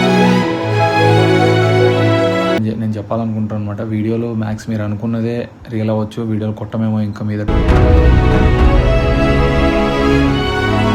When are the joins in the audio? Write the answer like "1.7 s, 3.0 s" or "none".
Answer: 2.6 s